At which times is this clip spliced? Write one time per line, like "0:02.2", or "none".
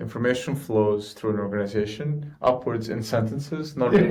none